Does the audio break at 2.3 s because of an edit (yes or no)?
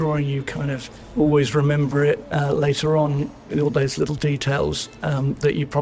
yes